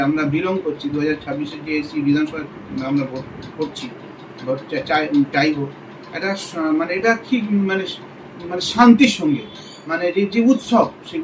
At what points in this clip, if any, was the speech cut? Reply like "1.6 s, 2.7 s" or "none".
none